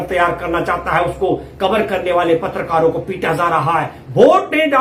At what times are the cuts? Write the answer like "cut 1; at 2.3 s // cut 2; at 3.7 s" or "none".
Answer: none